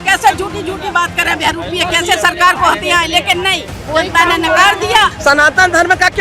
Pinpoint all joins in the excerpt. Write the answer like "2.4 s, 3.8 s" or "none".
5.2 s